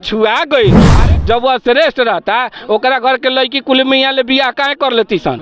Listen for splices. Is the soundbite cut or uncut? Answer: cut